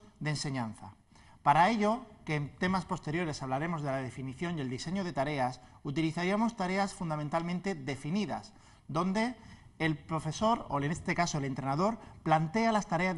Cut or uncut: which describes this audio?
uncut